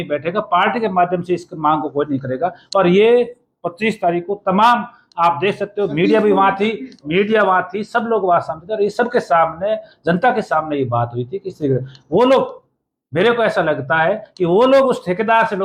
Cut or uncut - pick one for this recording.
uncut